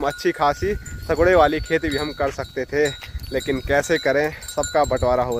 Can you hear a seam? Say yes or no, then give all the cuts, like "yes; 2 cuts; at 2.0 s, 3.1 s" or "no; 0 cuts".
no; 0 cuts